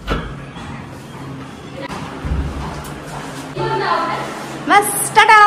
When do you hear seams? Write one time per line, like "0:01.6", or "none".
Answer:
0:01.8
0:03.5